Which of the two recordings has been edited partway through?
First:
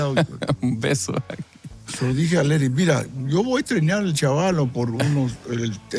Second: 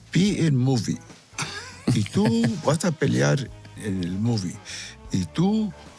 second; 1 cut; at 3.8 s

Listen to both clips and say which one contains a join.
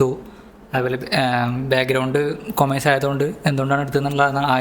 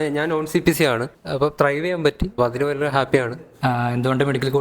second; 3 cuts; at 1.2 s, 2.3 s, 3.4 s

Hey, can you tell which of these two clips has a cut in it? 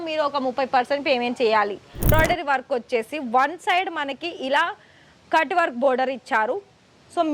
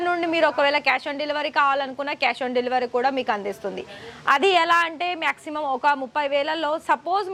first; 1 cut; at 2.1 s

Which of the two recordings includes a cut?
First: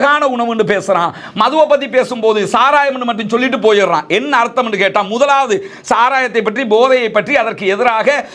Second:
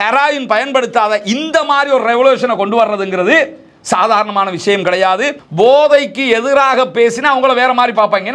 second; 1 cut; at 5.4 s

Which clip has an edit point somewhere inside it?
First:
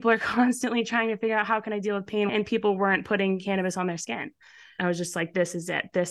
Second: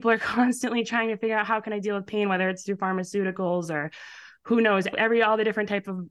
first; 2 cuts; at 2.3 s, 4.7 s

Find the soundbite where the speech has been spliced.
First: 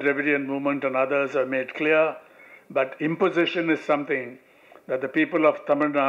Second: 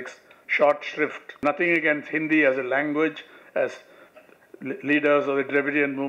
second; 1 cut; at 1.4 s

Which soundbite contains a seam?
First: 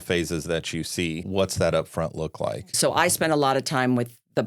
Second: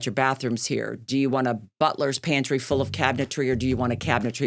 first; 2 cuts; at 1.2 s, 2.7 s

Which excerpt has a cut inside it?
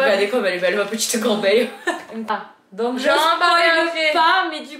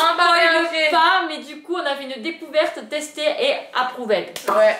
first; 1 cut; at 2.2 s

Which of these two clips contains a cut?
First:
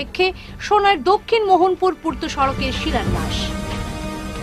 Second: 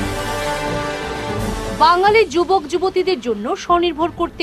second; 1 cut; at 1.1 s

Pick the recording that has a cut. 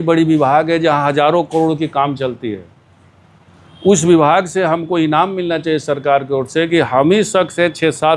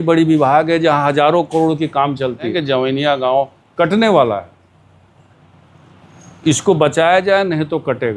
second; 1 cut; at 2.5 s

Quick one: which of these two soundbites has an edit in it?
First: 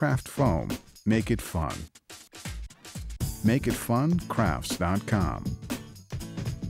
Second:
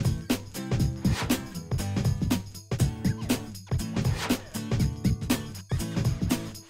first; 1 cut; at 5.4 s

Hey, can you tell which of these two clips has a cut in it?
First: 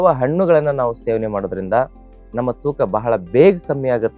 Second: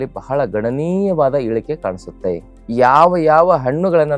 second; 1 cut; at 2.5 s

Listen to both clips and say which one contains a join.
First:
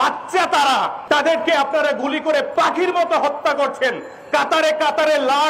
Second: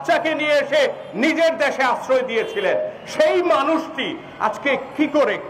first; 2 cuts; at 1.0 s, 2.5 s

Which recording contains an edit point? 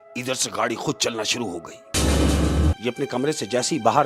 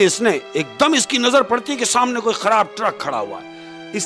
first; 1 cut; at 2.7 s

